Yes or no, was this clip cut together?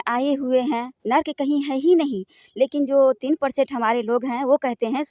no